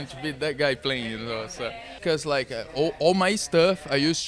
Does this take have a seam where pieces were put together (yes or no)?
yes